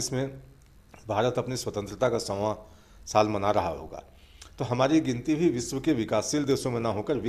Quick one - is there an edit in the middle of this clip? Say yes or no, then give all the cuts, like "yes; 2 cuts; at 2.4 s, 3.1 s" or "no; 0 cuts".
no; 0 cuts